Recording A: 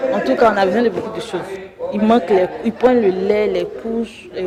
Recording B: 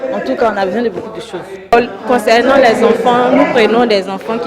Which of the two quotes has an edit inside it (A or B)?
B